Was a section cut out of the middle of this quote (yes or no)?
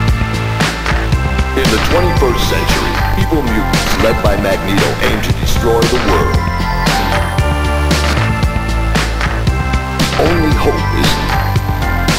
no